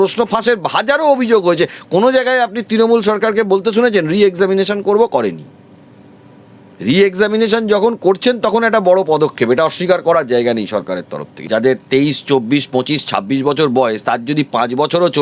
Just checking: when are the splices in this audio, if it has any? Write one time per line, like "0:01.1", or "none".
0:11.3